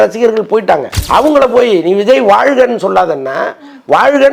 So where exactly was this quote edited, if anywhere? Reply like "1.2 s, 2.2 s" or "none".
0.9 s